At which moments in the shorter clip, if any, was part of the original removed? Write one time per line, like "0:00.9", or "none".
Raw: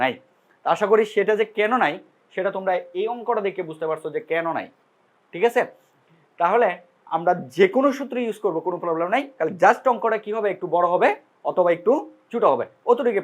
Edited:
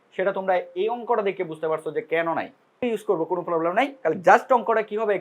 0:02.7